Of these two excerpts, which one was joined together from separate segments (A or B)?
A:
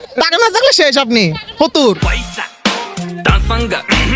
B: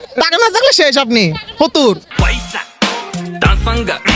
A